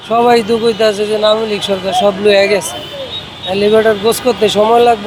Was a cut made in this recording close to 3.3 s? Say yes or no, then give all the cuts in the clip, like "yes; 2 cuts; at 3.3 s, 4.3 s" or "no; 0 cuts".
no; 0 cuts